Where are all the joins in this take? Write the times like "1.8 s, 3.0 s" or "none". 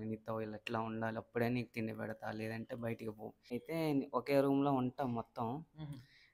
3.3 s